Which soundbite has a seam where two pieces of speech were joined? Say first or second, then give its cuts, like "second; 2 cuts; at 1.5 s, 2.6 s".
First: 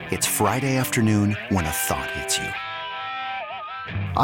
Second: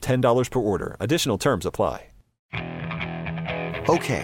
second; 1 cut; at 2.3 s